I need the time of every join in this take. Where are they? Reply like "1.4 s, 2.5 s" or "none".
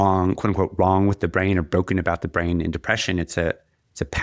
none